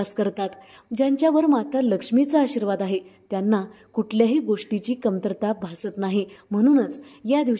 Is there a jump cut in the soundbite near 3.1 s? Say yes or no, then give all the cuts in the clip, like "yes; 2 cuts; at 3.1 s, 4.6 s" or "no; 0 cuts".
no; 1 cut; at 6.4 s